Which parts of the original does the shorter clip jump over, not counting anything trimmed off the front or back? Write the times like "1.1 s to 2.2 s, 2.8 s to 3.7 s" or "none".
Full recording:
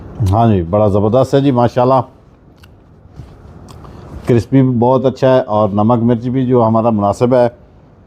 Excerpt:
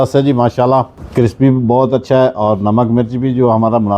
2.2 s to 4.1 s